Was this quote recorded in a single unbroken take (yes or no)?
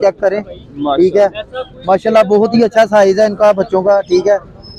yes